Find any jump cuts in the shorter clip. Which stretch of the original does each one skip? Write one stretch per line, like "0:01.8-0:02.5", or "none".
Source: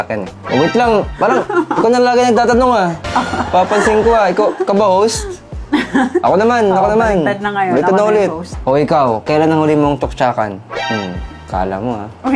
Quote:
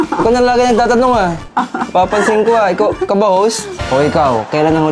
0:05.3-0:08.5